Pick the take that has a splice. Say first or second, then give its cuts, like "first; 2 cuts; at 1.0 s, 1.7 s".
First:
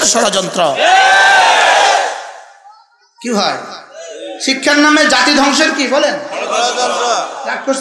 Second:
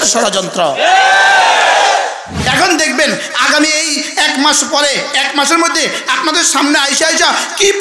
second; 1 cut; at 2.3 s